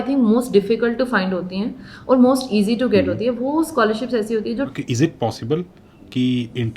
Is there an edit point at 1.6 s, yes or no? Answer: no